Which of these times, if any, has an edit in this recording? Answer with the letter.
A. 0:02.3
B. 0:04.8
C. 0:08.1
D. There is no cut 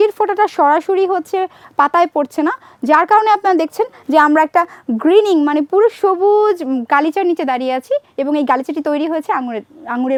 D